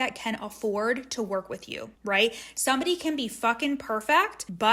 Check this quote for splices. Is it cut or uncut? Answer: uncut